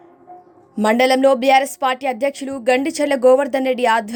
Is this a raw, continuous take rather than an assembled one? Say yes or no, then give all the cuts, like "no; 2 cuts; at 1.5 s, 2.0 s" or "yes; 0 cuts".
yes; 0 cuts